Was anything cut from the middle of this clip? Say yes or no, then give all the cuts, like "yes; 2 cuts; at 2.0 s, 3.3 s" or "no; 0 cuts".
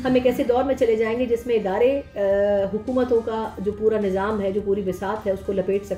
no; 0 cuts